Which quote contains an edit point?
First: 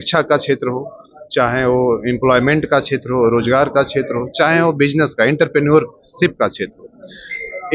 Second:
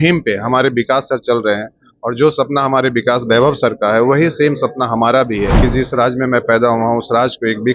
second; 1 cut; at 5.5 s

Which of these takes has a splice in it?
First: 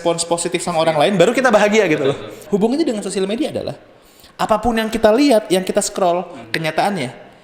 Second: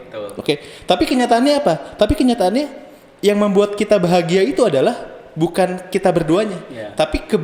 first; 2 cuts; at 2.3 s, 6.4 s

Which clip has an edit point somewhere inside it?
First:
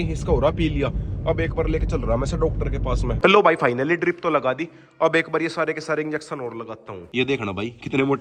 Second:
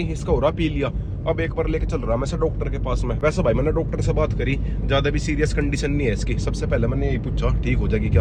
first; 2 cuts; at 3.2 s, 6.9 s

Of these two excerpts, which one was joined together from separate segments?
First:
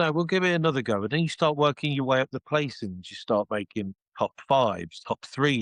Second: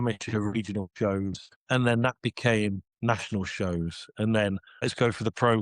second; 3 cuts; at 1.5 s, 2.9 s, 4.9 s

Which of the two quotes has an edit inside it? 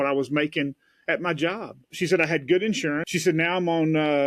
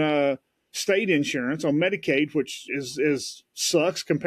first; 2 cuts; at 1.8 s, 3.0 s

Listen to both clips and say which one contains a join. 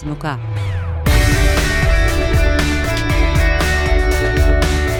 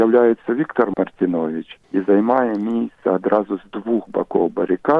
second; 1 cut; at 0.9 s

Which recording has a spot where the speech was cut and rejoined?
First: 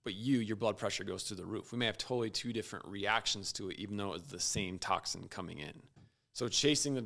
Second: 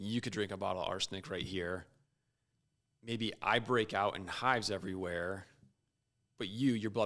first; 1 cut; at 6.0 s

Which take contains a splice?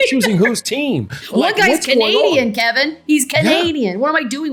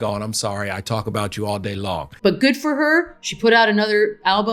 second; 1 cut; at 2.1 s

